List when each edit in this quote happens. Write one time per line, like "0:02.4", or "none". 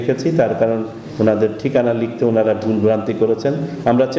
none